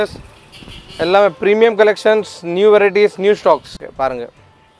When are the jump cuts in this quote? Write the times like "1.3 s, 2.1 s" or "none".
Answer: 3.7 s